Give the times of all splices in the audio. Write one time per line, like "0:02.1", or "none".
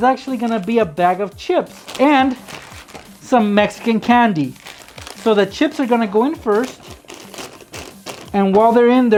none